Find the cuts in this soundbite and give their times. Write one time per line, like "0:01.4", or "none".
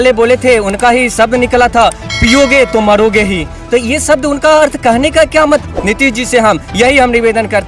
0:05.6